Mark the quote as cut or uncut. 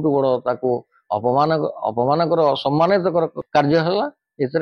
cut